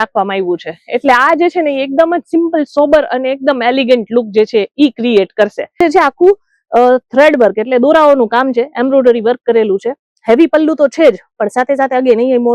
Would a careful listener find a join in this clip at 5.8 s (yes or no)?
yes